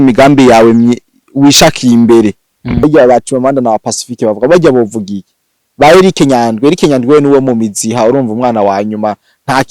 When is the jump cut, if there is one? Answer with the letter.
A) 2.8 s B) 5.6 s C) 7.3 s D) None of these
A